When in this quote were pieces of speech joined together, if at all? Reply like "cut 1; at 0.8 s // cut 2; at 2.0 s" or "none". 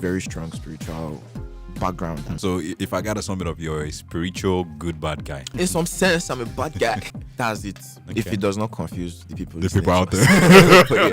cut 1; at 2.3 s // cut 2; at 5.5 s // cut 3; at 7.0 s